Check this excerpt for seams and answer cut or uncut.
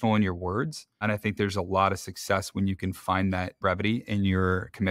uncut